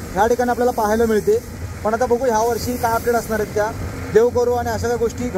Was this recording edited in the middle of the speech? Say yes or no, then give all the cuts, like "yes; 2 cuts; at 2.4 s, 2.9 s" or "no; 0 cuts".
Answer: no; 0 cuts